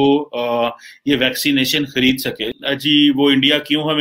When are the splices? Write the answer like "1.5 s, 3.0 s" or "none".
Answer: 2.4 s